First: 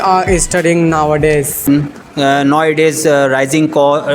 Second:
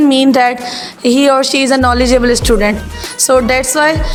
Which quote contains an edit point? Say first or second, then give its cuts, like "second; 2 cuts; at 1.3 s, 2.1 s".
first; 1 cut; at 1.6 s